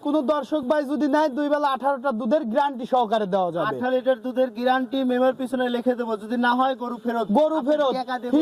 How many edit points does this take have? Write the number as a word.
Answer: zero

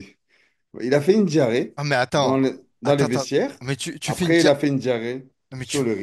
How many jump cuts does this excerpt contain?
zero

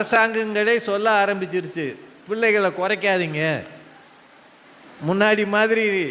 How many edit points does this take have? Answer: zero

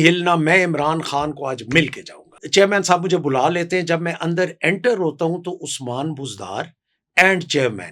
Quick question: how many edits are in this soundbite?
one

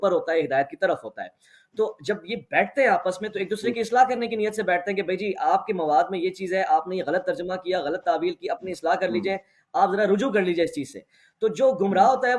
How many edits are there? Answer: zero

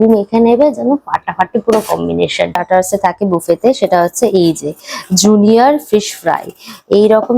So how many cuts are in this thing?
one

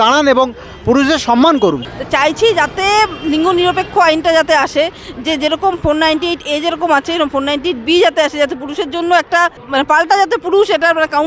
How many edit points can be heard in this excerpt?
two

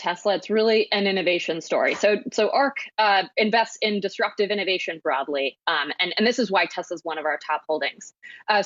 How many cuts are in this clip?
zero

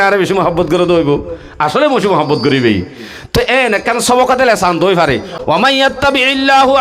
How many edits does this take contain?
one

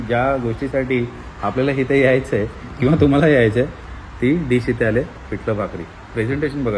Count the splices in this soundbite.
zero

